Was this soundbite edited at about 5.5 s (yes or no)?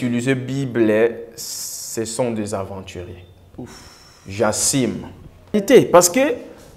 yes